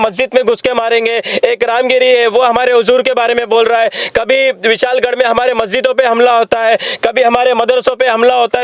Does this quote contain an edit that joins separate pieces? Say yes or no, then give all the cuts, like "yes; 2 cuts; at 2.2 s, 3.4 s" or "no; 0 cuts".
no; 0 cuts